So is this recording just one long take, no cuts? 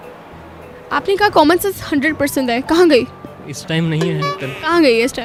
yes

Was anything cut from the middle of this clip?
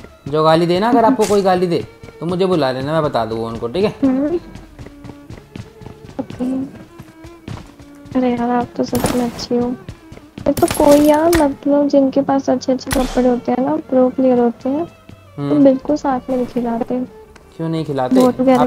no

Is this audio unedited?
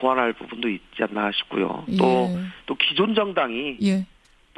no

